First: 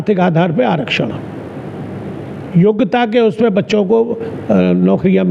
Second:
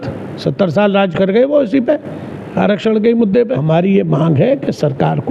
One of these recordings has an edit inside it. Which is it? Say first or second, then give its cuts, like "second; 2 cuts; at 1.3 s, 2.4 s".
second; 1 cut; at 3.5 s